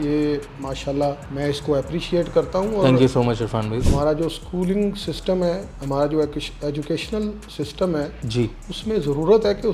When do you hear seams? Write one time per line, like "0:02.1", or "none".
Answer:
0:01.3
0:03.8